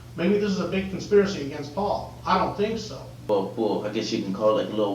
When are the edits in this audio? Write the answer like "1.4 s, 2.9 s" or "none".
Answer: 3.1 s